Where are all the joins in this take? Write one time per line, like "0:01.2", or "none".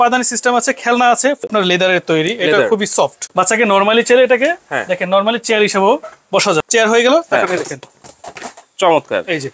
0:01.4
0:03.2
0:06.6